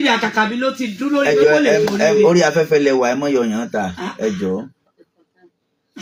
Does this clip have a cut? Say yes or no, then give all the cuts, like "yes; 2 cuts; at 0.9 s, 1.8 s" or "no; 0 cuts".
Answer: no; 0 cuts